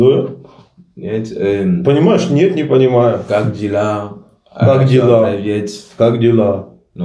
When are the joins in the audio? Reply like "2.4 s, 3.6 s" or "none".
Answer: none